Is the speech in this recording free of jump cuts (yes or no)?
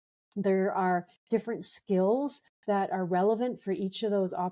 yes